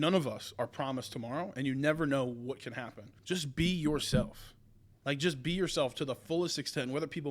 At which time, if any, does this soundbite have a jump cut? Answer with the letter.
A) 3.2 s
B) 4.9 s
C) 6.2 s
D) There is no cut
A